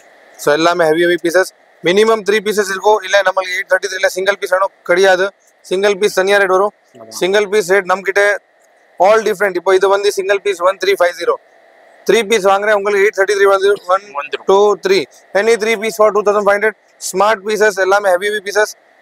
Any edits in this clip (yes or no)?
no